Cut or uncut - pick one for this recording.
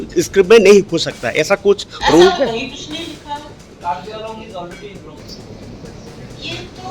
cut